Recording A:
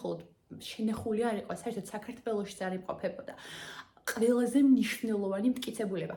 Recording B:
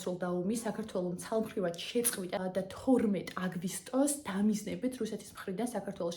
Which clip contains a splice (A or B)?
B